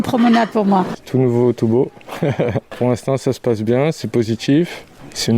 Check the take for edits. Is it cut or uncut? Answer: cut